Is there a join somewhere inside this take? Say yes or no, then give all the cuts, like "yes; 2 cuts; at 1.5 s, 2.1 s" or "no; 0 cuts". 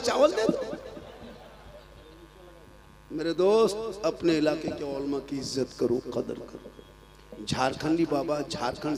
no; 0 cuts